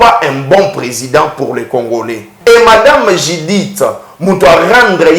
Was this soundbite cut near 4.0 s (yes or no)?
no